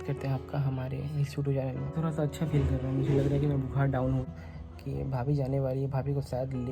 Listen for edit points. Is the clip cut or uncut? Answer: cut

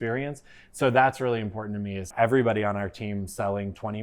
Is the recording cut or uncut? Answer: cut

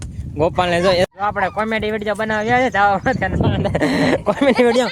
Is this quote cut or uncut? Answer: cut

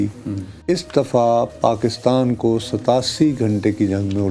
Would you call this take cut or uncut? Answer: uncut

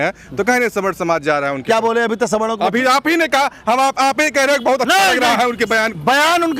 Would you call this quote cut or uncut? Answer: uncut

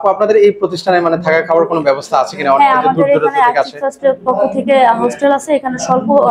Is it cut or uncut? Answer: uncut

